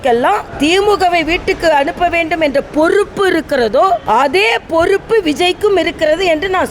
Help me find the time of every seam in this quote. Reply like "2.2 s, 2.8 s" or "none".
4.0 s